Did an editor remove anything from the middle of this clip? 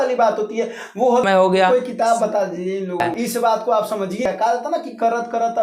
yes; 3 cuts; at 1.2 s, 3.1 s, 4.2 s

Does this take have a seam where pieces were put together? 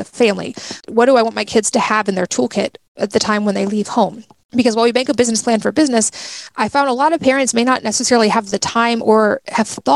no; 0 cuts

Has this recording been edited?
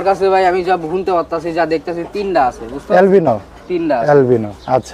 no; 0 cuts

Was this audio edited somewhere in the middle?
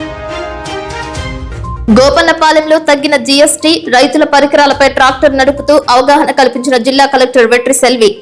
no; 0 cuts

